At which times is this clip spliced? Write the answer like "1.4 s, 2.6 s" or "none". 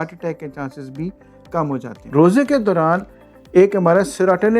1.9 s